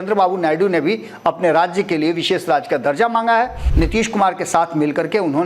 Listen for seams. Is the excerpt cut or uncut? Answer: cut